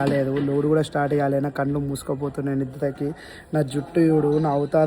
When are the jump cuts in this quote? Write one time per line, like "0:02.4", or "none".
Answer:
none